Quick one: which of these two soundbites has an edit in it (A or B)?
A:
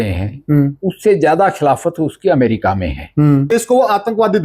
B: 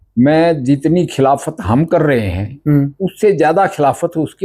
A